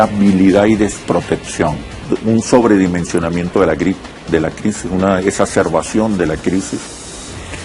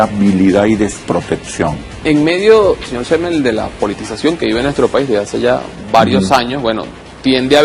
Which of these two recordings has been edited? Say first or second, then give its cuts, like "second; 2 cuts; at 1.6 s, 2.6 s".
second; 1 cut; at 2.0 s